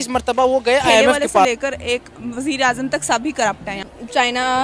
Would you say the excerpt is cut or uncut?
cut